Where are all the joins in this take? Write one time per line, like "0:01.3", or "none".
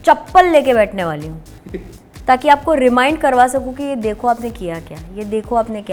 none

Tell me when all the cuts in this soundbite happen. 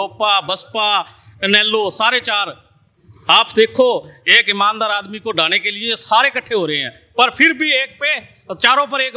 none

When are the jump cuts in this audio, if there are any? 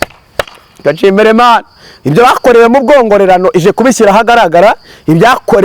none

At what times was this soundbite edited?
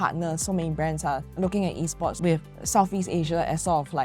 0:02.2

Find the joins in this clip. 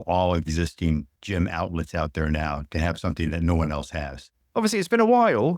0:01.2
0:04.4

